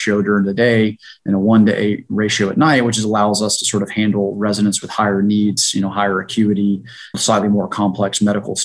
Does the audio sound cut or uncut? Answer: cut